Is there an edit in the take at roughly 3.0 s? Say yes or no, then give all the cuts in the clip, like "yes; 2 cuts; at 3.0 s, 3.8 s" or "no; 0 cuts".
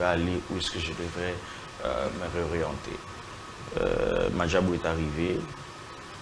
no; 0 cuts